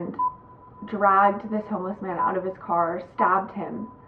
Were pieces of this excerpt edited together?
no; 0 cuts

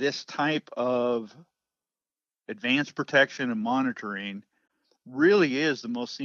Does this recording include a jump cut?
no; 0 cuts

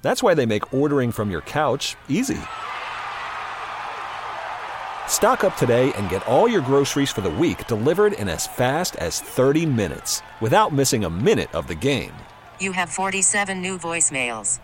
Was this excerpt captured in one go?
yes; 0 cuts

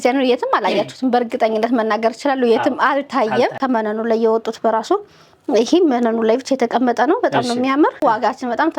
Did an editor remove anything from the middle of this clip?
yes; 2 cuts; at 3.6 s, 8.0 s

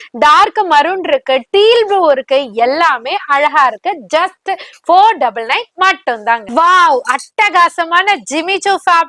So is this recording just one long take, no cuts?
yes; 0 cuts

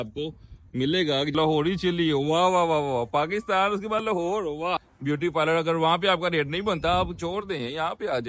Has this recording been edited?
yes; 2 cuts; at 1.3 s, 4.9 s

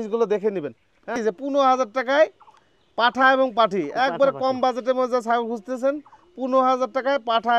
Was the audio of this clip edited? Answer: yes; 1 cut; at 1.2 s

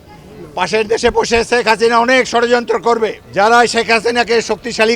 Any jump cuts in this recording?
yes; 1 cut; at 3.2 s

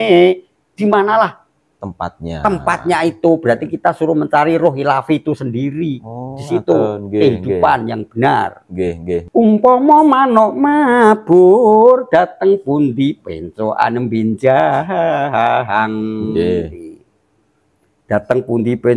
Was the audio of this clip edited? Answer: yes; 1 cut; at 9.3 s

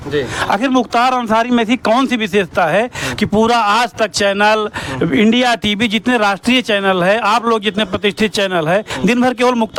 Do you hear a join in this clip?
no; 0 cuts

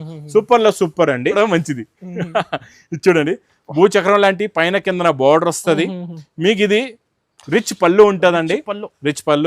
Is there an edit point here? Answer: yes; 1 cut; at 1.4 s

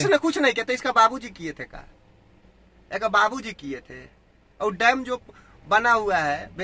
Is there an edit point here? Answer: no; 0 cuts

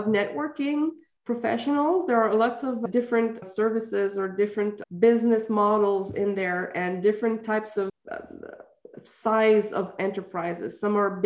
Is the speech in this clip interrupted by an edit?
no; 0 cuts

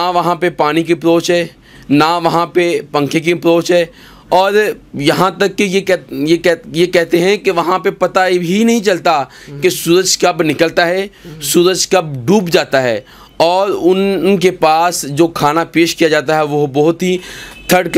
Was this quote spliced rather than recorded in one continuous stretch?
no; 0 cuts

